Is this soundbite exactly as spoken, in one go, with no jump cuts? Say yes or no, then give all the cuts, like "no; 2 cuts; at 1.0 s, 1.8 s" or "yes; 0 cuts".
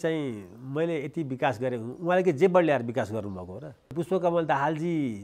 no; 1 cut; at 3.9 s